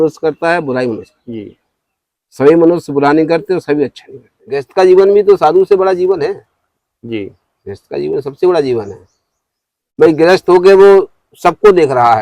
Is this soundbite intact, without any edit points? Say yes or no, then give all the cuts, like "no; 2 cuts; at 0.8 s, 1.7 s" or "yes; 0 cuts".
no; 1 cut; at 4.7 s